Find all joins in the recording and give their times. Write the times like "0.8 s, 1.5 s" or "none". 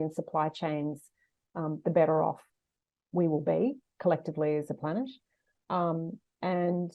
none

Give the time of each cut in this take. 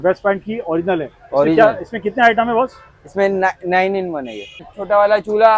4.7 s

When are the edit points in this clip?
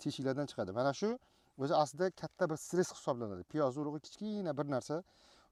none

